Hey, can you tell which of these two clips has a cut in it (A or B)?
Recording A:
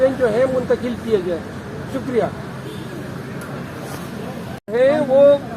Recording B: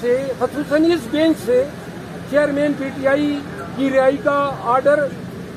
A